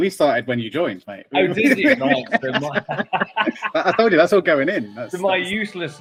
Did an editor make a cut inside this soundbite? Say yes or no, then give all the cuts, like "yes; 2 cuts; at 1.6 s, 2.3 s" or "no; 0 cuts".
no; 0 cuts